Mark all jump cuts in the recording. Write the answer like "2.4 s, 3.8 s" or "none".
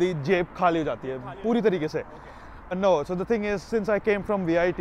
2.8 s